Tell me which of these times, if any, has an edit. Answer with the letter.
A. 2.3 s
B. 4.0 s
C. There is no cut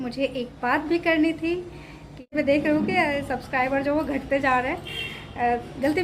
A